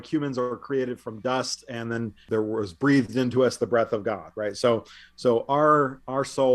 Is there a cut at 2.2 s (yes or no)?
yes